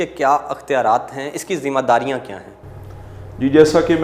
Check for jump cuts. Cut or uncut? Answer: uncut